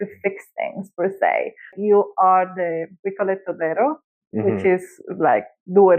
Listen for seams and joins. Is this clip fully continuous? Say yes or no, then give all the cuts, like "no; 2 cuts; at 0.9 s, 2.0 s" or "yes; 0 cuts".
no; 1 cut; at 1.7 s